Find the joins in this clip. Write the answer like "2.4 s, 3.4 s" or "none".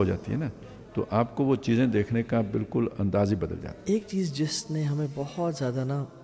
3.7 s